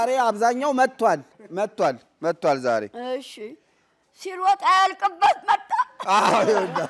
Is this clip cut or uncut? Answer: uncut